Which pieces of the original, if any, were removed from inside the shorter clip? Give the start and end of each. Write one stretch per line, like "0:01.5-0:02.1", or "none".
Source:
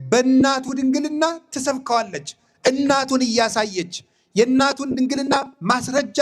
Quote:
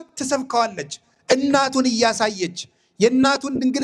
none